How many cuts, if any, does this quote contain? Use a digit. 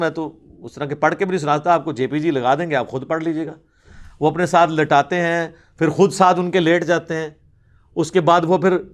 0